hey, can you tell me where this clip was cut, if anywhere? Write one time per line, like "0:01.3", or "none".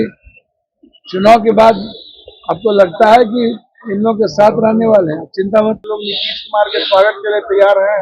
0:05.8